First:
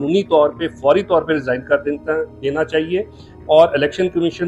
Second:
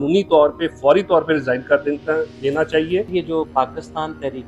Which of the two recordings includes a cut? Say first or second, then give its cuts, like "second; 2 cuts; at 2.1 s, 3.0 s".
second; 1 cut; at 3.1 s